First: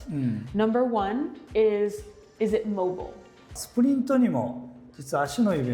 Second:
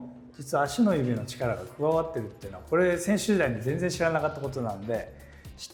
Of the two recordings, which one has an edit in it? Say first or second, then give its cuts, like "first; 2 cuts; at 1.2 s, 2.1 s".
first; 1 cut; at 3.6 s